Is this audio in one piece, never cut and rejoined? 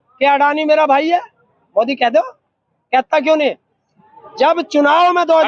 yes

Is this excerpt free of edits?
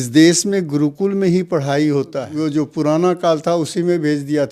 no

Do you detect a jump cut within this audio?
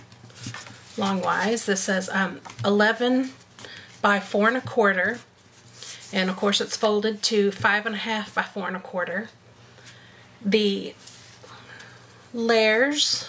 yes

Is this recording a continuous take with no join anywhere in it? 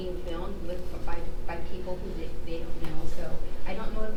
yes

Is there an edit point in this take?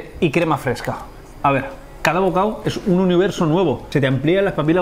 yes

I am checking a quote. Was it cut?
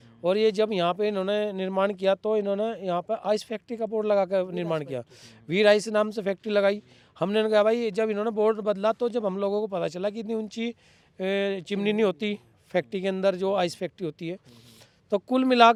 no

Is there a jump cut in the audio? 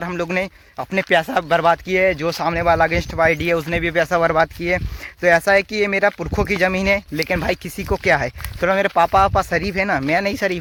no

